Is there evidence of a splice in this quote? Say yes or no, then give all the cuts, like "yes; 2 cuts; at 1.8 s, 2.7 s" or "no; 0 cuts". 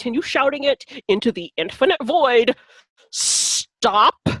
no; 0 cuts